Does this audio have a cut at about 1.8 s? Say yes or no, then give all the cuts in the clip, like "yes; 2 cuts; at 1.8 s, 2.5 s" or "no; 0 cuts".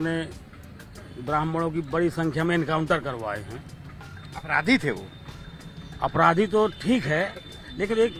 no; 0 cuts